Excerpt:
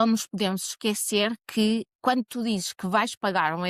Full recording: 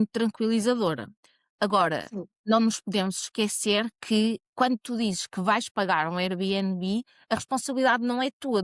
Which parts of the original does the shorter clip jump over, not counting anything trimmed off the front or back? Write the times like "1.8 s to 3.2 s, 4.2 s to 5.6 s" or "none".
none